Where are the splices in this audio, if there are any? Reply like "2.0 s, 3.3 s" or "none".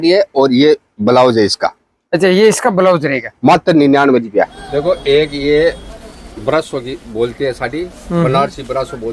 4.6 s